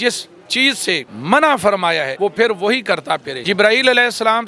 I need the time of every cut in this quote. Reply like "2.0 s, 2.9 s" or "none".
1.1 s, 2.1 s, 3.3 s